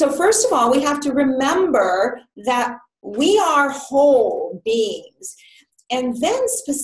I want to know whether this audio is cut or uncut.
uncut